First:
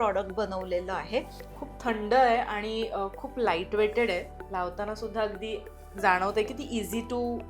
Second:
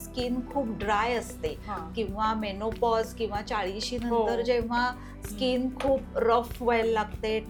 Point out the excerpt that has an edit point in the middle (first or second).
first